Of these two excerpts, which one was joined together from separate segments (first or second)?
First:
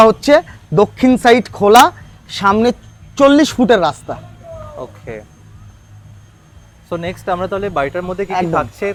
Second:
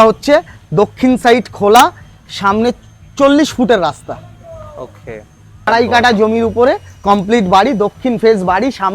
second